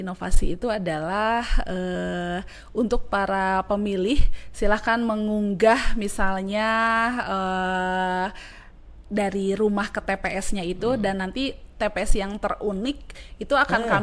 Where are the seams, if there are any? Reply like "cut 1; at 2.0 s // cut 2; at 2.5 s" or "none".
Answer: none